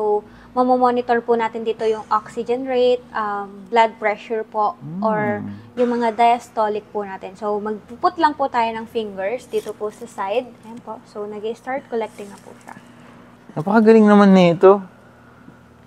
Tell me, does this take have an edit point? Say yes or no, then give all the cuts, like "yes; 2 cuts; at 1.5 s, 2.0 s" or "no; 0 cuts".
no; 0 cuts